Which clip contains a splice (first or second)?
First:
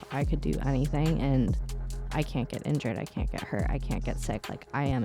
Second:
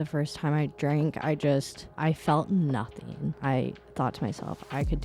second